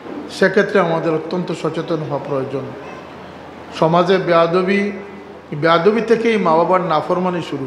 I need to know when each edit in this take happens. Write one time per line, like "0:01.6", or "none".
none